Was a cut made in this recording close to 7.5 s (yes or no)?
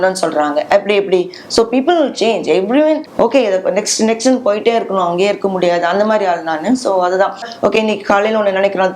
yes